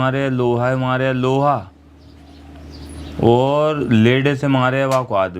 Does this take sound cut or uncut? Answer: uncut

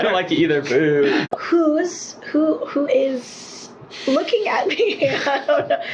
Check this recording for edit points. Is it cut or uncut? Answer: cut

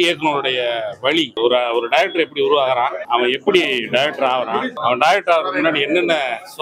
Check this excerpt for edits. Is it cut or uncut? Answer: cut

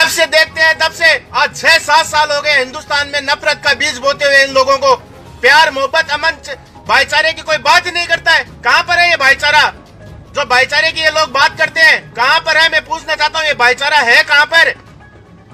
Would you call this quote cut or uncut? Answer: uncut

